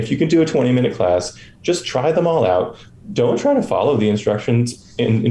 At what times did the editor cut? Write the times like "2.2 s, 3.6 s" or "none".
none